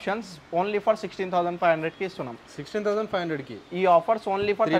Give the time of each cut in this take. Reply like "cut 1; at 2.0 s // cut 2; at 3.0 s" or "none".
none

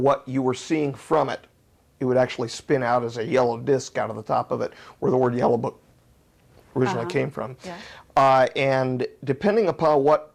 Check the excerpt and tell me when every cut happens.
none

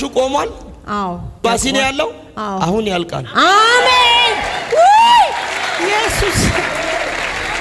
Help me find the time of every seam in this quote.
none

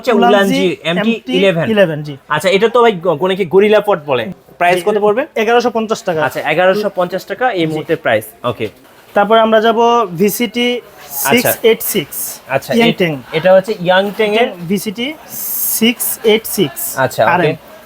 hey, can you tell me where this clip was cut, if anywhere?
cut 1; at 4.3 s // cut 2; at 8.8 s

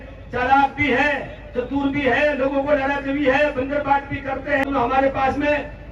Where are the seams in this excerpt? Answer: cut 1; at 4.6 s

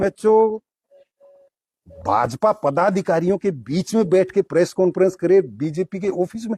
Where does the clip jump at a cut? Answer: none

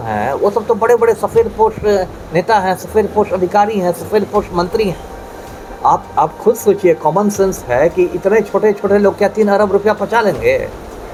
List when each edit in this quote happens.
none

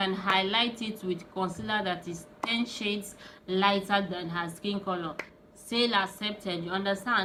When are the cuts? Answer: none

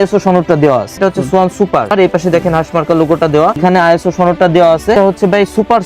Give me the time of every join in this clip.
cut 1; at 1.0 s // cut 2; at 1.9 s // cut 3; at 3.6 s // cut 4; at 4.9 s

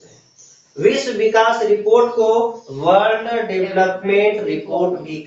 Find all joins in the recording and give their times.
none

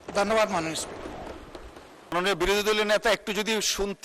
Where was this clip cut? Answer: cut 1; at 2.1 s

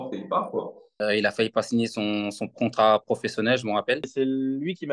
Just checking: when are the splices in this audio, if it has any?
cut 1; at 0.9 s // cut 2; at 4.0 s

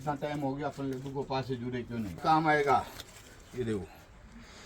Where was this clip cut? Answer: cut 1; at 2.2 s

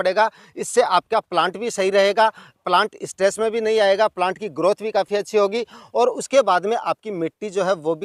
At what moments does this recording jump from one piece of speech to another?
none

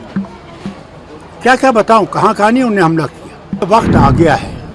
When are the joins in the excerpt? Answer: cut 1; at 3.6 s

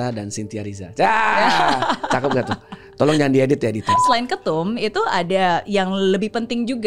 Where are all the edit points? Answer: cut 1; at 4.0 s

